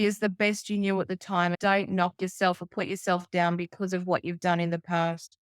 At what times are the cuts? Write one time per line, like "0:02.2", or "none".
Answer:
0:01.6